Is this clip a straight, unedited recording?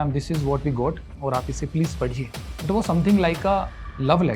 no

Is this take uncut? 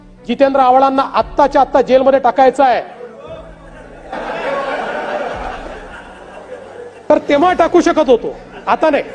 yes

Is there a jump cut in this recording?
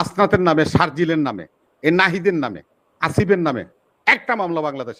no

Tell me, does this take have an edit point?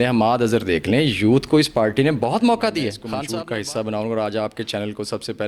yes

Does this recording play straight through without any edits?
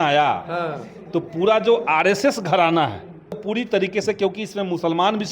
no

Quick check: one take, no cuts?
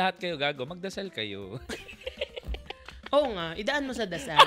yes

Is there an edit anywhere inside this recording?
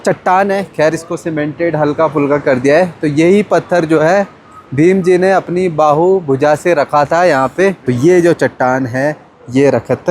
yes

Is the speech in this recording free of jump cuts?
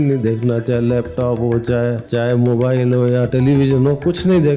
no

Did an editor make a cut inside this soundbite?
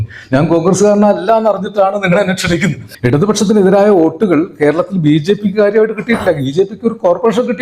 yes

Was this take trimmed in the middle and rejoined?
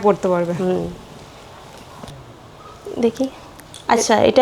yes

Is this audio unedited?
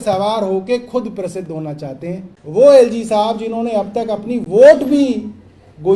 no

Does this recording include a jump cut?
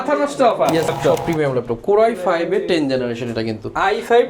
yes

